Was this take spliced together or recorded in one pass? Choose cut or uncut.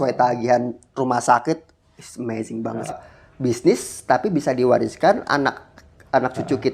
cut